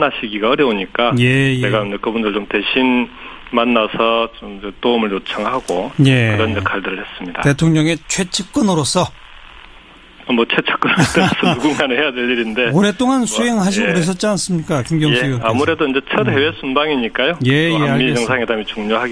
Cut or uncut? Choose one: cut